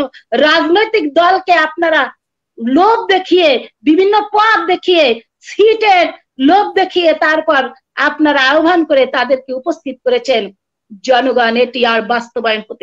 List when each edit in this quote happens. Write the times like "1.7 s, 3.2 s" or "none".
none